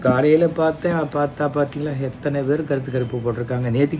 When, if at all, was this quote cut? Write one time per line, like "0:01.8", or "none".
none